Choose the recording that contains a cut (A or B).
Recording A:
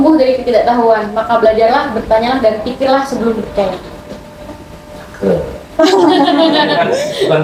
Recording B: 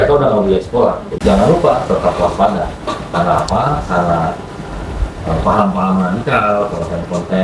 B